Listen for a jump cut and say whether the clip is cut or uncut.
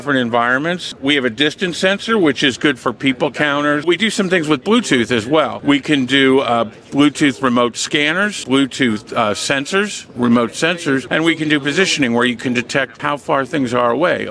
cut